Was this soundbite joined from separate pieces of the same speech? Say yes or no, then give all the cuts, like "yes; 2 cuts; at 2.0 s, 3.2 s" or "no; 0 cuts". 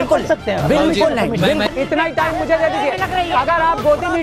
yes; 1 cut; at 1.6 s